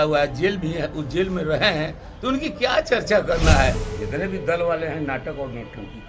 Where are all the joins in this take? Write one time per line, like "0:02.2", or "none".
0:03.9